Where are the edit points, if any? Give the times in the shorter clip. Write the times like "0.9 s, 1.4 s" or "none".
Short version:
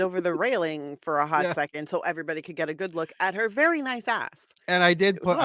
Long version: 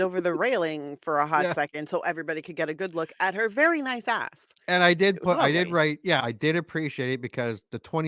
none